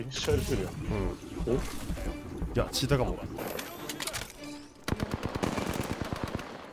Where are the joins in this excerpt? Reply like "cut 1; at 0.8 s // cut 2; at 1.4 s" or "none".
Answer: cut 1; at 3.4 s